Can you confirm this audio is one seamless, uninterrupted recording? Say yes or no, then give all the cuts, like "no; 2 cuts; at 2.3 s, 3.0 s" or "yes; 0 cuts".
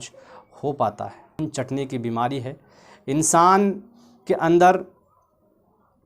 no; 1 cut; at 1.4 s